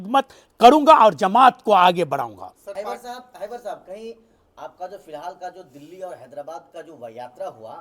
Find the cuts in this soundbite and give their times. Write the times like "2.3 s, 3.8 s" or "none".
2.7 s